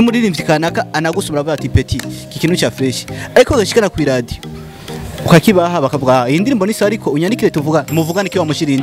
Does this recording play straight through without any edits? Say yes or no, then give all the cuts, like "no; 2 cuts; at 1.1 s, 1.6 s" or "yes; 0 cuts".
yes; 0 cuts